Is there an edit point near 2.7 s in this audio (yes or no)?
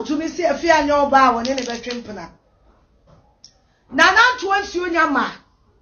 no